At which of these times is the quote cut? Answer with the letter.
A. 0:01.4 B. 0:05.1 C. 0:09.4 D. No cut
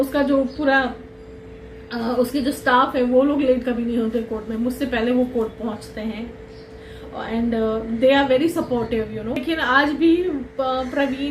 C